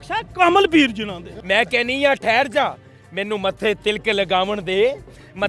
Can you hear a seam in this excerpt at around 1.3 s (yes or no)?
yes